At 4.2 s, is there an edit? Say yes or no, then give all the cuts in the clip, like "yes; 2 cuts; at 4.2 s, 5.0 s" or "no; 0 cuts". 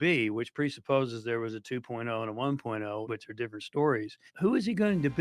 yes; 2 cuts; at 3.0 s, 4.2 s